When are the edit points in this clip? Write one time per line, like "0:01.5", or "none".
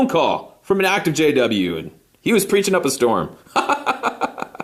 0:02.1